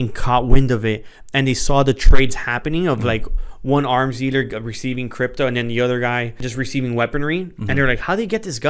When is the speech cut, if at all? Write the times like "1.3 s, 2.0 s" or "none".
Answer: 6.4 s